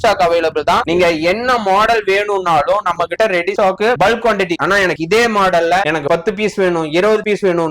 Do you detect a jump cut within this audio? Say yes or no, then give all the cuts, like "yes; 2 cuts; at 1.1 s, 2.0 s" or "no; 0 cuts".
no; 0 cuts